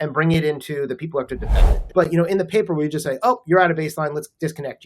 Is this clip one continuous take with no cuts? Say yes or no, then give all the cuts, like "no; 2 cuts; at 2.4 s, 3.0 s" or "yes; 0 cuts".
no; 1 cut; at 1.7 s